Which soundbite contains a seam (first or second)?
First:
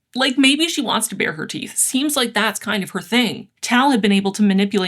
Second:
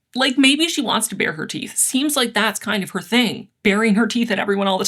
first